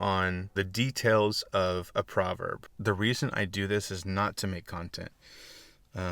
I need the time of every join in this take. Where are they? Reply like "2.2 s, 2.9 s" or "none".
2.7 s